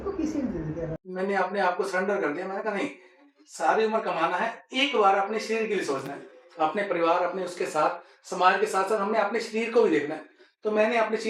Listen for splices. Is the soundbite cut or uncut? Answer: cut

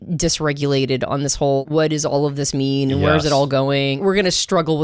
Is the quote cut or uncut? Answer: cut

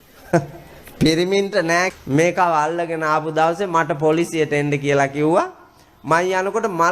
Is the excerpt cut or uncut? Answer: cut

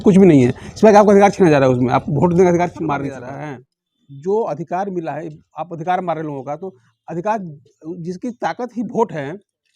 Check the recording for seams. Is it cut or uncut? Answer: cut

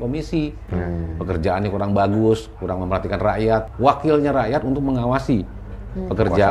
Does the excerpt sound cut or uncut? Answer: cut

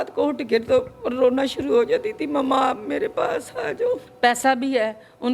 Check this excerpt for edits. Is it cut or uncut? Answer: cut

